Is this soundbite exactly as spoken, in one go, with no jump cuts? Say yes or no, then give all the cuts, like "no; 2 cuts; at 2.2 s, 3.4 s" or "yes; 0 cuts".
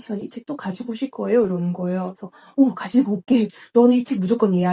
yes; 0 cuts